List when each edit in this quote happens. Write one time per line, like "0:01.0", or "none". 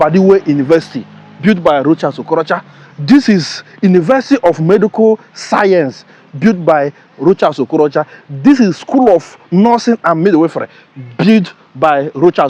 none